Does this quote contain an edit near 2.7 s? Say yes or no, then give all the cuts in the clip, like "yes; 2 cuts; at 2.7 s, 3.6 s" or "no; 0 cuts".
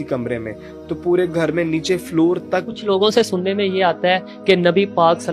yes; 1 cut; at 2.7 s